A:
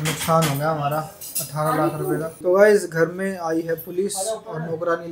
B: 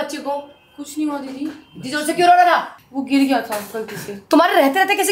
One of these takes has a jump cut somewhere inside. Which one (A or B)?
A